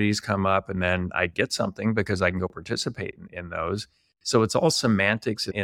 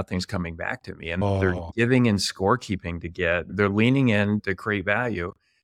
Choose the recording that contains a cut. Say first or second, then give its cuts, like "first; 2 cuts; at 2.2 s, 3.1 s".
second; 3 cuts; at 1.2 s, 3.5 s, 4.4 s